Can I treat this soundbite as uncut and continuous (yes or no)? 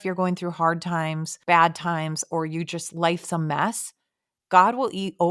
no